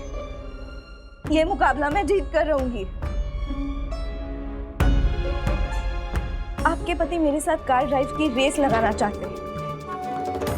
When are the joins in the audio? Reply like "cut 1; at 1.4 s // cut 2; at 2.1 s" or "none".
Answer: cut 1; at 9.2 s